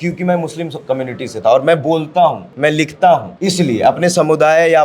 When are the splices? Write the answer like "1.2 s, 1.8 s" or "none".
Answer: 2.5 s, 3.3 s